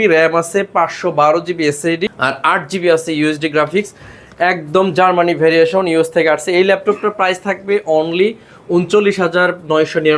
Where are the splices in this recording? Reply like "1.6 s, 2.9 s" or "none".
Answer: 2.1 s